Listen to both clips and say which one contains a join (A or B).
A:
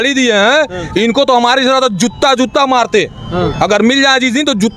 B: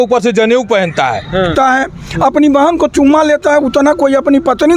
B